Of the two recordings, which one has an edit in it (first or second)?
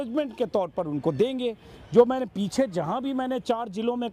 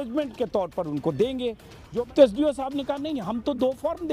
second